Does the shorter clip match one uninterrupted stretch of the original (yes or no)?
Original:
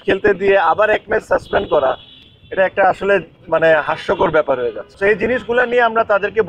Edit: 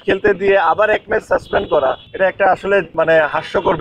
no